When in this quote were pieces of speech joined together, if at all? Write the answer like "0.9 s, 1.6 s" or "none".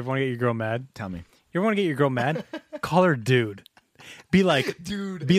1.3 s